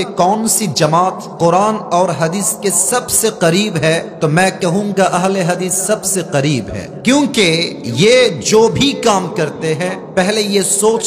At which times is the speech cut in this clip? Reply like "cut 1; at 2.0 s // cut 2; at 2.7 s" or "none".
cut 1; at 1.3 s // cut 2; at 4.1 s // cut 3; at 6.8 s // cut 4; at 7.8 s // cut 5; at 10.0 s